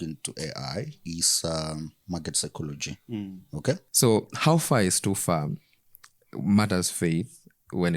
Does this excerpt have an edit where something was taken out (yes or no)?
yes